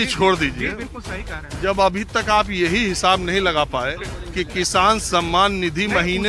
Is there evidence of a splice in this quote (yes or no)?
no